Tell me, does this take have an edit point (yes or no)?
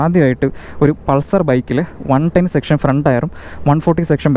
no